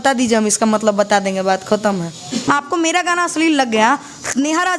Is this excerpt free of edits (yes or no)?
no